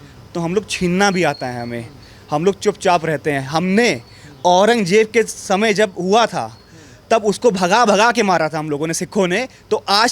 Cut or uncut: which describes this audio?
uncut